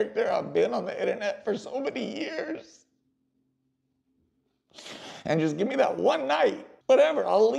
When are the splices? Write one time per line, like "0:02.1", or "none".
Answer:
0:06.7

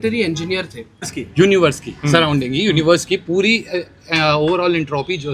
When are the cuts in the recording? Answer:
0:01.1

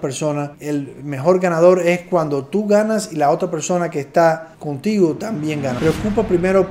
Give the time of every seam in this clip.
0:05.7

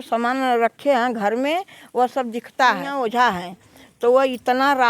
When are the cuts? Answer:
0:02.9

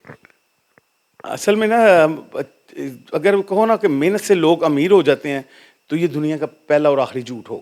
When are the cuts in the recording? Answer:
none

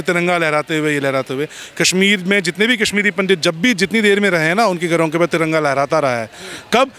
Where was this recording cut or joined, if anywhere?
none

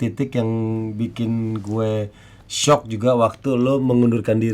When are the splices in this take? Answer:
none

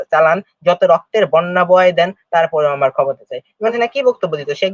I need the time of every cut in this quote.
0:03.7

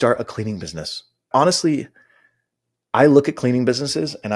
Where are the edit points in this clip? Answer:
0:01.3

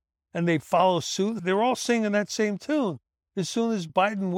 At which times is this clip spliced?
0:01.4

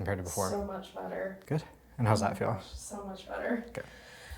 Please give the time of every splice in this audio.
0:01.4

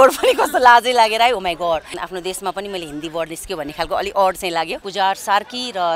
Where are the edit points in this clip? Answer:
0:01.9
0:04.8

